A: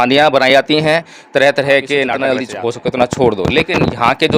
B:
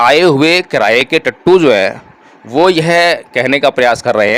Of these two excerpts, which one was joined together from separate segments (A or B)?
A